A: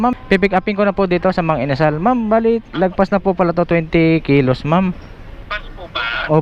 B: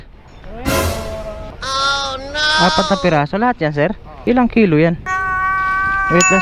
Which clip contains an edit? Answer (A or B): B